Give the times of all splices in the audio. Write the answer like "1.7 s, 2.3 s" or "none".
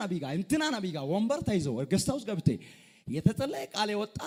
none

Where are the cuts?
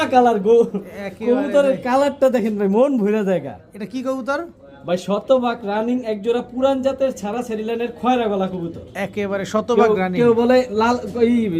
none

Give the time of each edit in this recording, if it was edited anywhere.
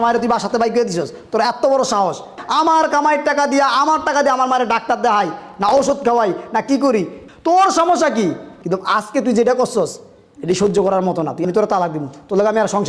2.4 s, 7.2 s, 8.5 s, 11.4 s

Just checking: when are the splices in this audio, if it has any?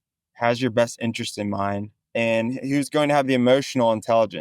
2.0 s

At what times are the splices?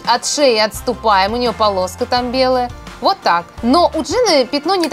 none

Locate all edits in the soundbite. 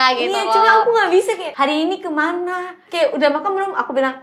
1.5 s, 2.8 s

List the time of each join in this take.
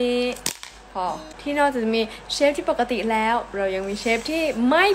1.3 s

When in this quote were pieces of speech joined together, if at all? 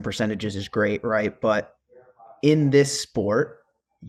none

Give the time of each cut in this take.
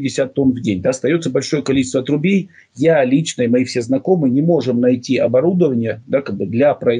none

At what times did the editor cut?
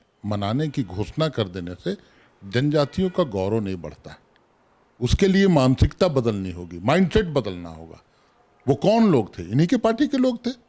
none

